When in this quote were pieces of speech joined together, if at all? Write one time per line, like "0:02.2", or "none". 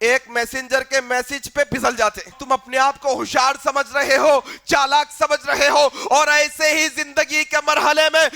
0:02.4